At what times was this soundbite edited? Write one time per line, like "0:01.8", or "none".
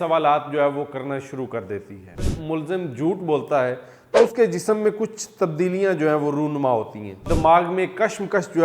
0:02.3
0:07.2